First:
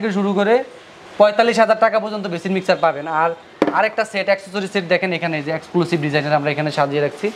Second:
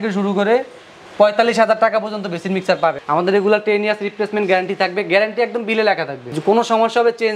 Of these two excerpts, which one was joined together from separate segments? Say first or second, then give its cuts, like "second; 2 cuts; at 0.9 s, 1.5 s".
second; 2 cuts; at 3.0 s, 6.3 s